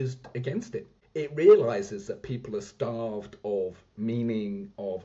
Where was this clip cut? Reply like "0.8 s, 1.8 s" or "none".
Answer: 1.0 s